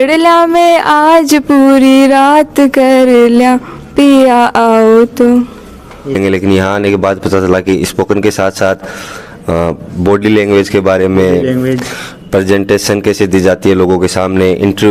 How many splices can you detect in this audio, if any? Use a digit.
1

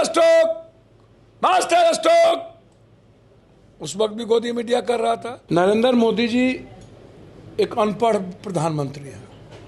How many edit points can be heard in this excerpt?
1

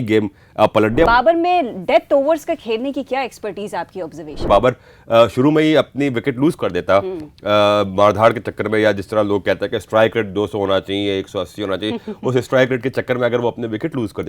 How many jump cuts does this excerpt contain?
2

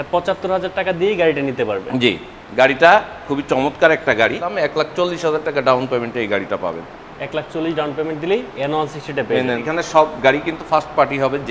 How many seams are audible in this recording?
2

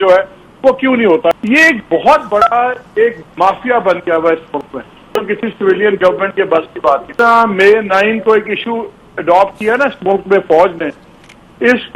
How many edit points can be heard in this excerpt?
3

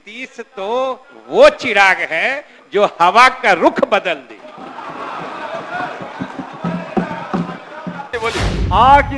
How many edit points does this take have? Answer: 1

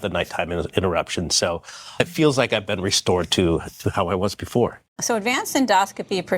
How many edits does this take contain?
1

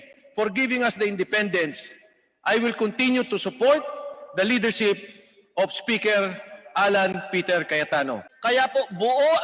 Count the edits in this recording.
1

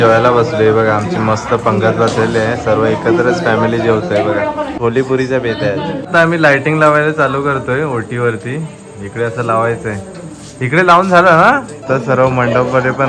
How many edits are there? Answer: 3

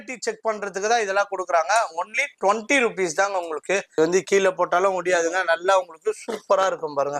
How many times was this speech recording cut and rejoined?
1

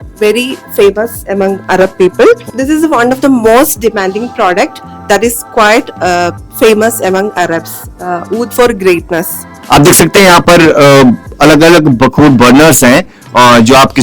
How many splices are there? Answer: 2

